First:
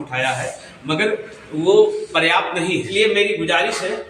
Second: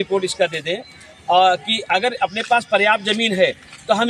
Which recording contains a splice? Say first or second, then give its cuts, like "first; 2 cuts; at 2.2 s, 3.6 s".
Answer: first; 1 cut; at 2.9 s